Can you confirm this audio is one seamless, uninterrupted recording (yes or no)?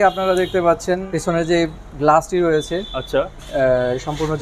no